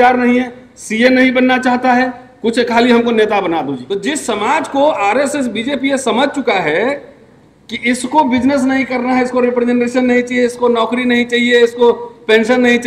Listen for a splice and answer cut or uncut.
cut